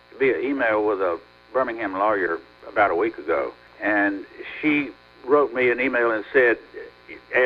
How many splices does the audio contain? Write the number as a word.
three